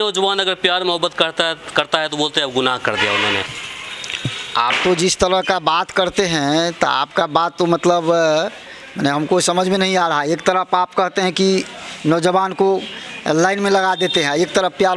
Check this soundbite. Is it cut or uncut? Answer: uncut